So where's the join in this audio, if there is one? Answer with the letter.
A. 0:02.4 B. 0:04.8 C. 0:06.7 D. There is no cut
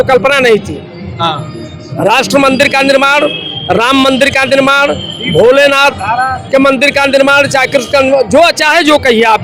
D